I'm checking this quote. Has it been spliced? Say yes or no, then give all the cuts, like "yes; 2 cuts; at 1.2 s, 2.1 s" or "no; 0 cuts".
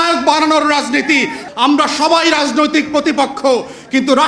yes; 1 cut; at 1.4 s